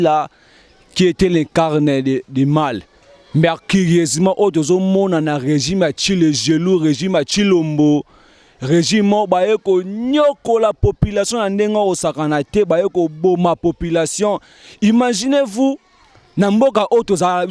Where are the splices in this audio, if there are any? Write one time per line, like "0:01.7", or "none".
none